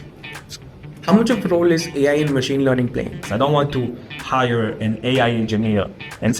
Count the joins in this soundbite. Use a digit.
1